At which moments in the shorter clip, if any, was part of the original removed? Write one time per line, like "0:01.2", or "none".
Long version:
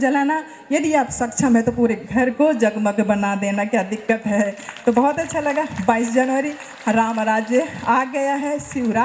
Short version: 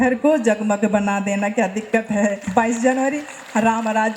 0:02.4